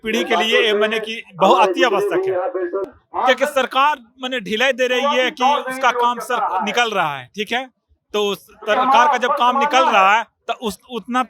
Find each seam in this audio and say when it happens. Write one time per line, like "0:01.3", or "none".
0:02.8